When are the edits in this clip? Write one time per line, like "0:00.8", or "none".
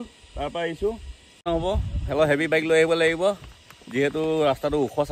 0:01.4